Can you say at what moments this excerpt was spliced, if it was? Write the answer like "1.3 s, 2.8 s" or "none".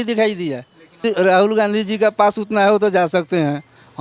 1.0 s